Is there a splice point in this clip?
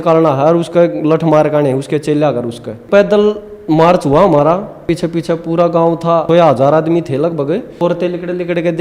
yes; 4 cuts; at 2.8 s, 4.8 s, 6.2 s, 7.8 s

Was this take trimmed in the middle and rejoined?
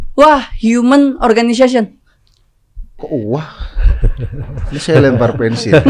no; 0 cuts

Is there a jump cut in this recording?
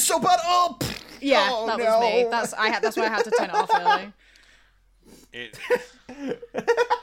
no; 0 cuts

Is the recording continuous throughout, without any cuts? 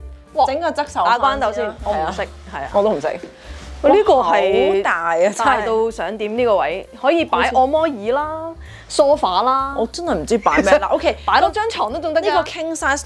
yes; 0 cuts

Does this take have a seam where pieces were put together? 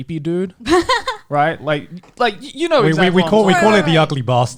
no; 0 cuts

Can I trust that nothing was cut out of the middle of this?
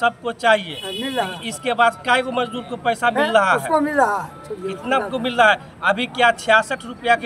yes; 0 cuts

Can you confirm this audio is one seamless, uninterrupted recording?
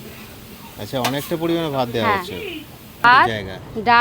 no; 1 cut; at 3.0 s

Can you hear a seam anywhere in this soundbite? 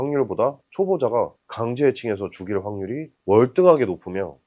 no; 0 cuts

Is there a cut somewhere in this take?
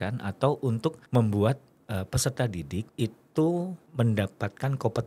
yes; 3 cuts; at 1.0 s, 2.9 s, 3.8 s

